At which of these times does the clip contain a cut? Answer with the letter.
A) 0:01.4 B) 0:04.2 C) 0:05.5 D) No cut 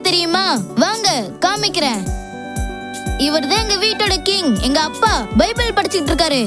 D